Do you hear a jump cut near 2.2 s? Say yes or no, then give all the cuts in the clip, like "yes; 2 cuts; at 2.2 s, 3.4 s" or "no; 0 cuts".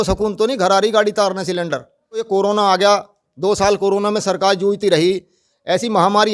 yes; 1 cut; at 2.2 s